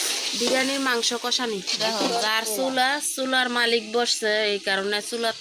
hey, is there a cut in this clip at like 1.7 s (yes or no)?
yes